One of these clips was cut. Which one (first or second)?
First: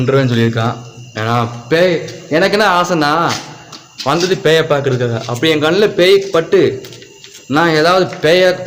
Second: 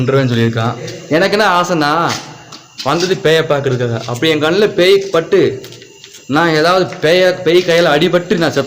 second